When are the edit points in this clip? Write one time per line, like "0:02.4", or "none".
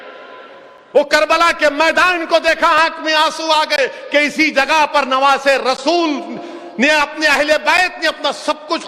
none